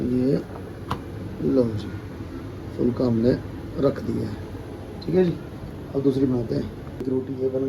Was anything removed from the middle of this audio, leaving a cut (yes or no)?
no